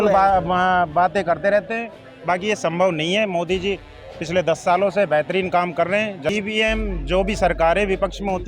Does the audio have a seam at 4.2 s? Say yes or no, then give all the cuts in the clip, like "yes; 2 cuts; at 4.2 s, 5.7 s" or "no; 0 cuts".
no; 1 cut; at 6.3 s